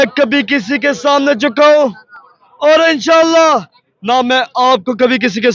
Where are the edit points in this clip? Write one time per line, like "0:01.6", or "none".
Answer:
none